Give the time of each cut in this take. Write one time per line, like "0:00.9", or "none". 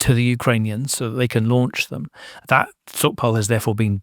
0:02.3